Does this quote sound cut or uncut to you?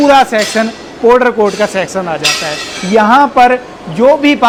uncut